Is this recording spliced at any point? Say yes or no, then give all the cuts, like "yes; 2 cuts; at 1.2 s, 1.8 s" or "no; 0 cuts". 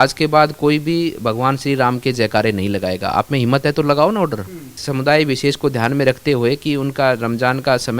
yes; 1 cut; at 4.8 s